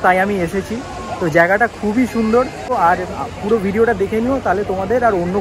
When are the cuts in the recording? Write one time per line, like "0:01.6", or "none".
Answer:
0:02.7